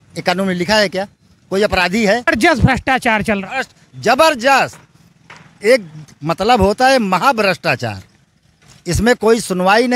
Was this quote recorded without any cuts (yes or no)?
no